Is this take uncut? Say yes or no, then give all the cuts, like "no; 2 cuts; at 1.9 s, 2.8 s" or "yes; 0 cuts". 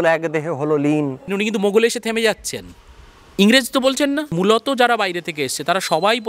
no; 2 cuts; at 1.3 s, 4.3 s